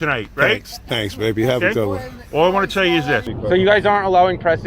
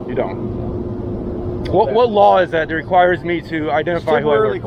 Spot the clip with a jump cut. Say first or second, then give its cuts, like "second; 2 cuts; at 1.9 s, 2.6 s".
first; 1 cut; at 3.3 s